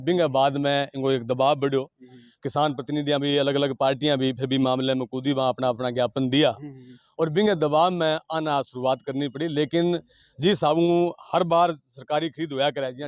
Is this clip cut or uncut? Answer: uncut